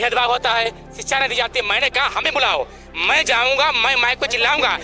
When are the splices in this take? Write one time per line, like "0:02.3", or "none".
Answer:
none

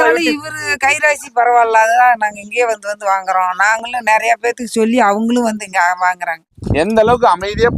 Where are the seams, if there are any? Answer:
0:06.6

